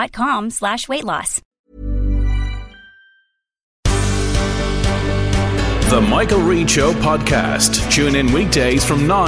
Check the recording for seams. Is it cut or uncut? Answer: cut